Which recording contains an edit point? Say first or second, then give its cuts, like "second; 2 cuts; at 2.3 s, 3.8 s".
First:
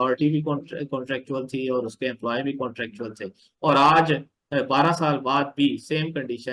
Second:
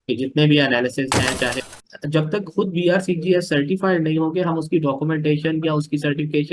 second; 1 cut; at 1.7 s